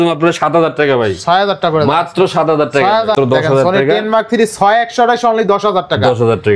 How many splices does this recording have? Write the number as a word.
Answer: one